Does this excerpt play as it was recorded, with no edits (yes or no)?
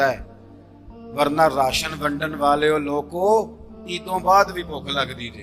yes